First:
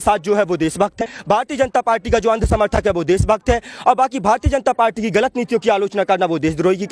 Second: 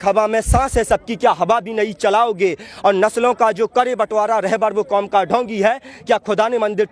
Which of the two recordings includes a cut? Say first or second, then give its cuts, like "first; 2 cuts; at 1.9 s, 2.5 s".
first; 1 cut; at 1.0 s